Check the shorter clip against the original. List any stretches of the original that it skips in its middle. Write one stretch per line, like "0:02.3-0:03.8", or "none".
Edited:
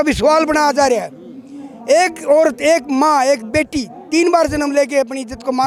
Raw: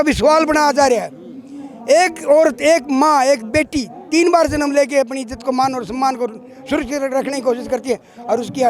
none